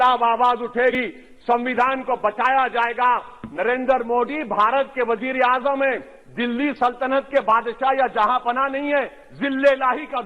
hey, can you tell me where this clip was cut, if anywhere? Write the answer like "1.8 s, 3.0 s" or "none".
0.9 s